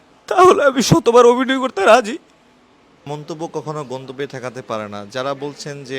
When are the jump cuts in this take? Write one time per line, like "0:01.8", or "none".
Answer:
0:03.0